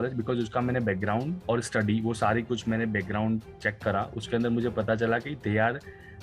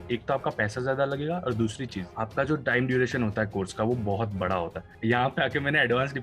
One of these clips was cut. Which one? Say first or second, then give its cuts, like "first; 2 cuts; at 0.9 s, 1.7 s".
second; 1 cut; at 4.9 s